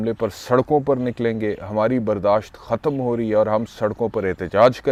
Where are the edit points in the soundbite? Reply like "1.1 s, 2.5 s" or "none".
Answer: none